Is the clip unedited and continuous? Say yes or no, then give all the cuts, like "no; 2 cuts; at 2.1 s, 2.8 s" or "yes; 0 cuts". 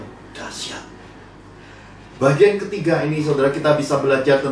yes; 0 cuts